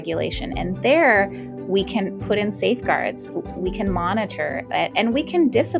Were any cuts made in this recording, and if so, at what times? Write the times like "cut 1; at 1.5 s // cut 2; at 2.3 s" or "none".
none